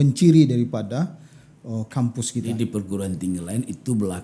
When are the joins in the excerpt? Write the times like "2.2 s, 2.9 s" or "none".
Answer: 2.5 s